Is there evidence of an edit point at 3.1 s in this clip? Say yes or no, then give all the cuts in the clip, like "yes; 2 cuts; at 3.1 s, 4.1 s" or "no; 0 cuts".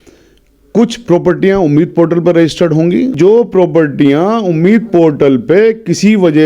yes; 1 cut; at 3.1 s